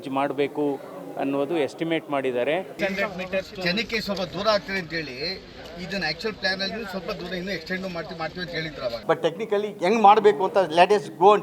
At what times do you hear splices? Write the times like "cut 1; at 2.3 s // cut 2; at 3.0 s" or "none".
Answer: cut 1; at 2.7 s // cut 2; at 9.0 s